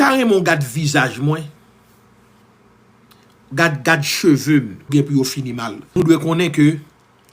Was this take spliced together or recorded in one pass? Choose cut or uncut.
cut